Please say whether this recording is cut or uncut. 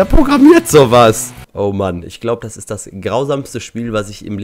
cut